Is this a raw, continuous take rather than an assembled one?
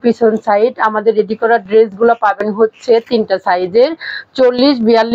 yes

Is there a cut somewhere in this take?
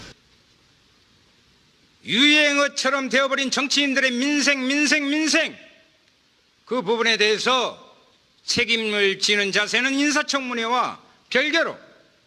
no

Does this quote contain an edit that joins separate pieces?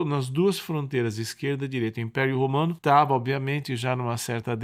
yes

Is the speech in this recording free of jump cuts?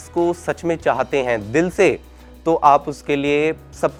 yes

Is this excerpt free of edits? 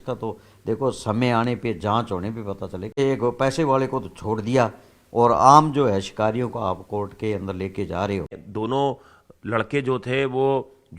no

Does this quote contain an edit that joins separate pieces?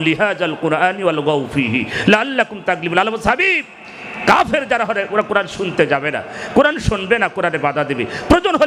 no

